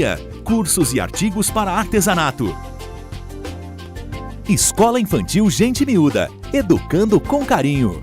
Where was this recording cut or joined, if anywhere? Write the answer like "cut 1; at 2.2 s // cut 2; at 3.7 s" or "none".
cut 1; at 4.4 s

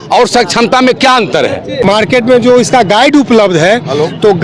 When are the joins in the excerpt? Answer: cut 1; at 1.8 s

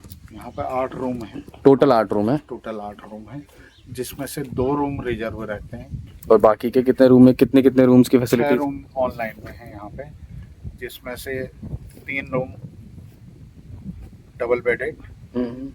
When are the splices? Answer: cut 1; at 5.9 s

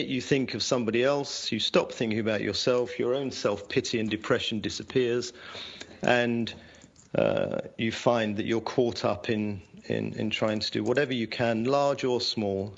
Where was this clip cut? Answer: none

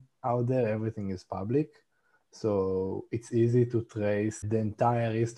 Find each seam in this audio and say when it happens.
cut 1; at 4.4 s

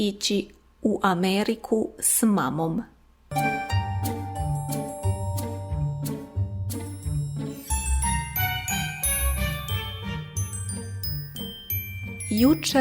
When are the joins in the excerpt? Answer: none

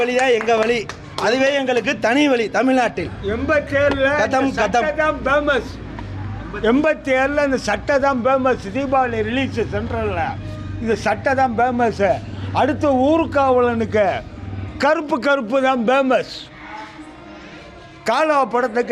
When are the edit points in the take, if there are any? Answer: none

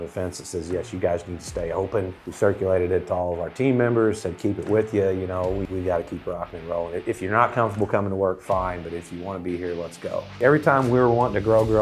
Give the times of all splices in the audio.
cut 1; at 2.2 s // cut 2; at 5.7 s // cut 3; at 10.4 s

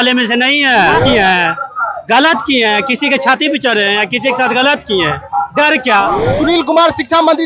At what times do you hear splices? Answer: cut 1; at 1.0 s // cut 2; at 6.3 s

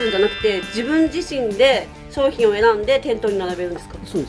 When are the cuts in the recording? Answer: none

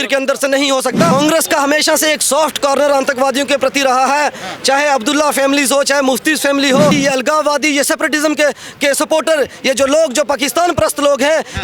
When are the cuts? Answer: cut 1; at 1.1 s // cut 2; at 6.9 s

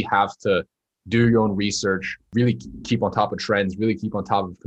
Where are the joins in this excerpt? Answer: cut 1; at 2.2 s

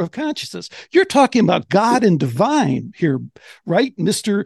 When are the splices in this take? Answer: none

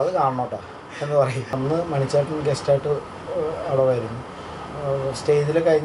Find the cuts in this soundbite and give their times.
cut 1; at 1.6 s

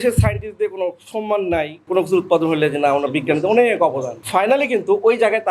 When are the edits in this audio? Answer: cut 1; at 1.8 s // cut 2; at 4.2 s

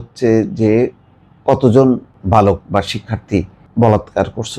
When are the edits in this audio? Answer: cut 1; at 2.1 s // cut 2; at 3.6 s

